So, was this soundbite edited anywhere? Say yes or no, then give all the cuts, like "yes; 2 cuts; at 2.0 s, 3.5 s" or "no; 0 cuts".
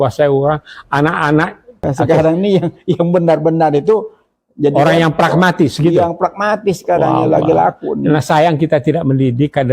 yes; 1 cut; at 1.8 s